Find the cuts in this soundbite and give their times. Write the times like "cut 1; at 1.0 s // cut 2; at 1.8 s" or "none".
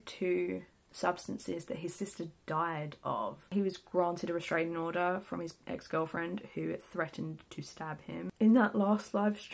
cut 1; at 3.5 s // cut 2; at 8.3 s